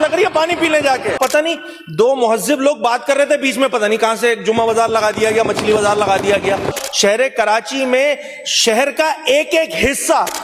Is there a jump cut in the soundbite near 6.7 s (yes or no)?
yes